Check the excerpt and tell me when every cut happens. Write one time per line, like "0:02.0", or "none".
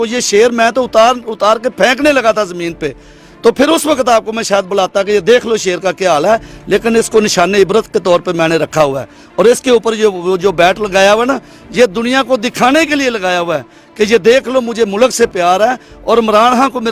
none